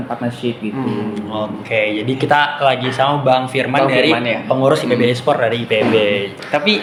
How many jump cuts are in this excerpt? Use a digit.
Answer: 0